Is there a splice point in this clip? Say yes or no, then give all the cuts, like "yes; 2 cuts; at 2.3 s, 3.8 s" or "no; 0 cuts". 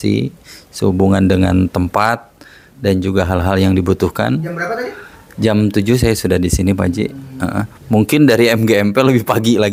no; 0 cuts